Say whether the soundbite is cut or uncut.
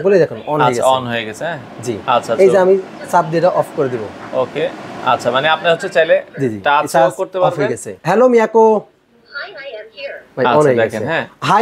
cut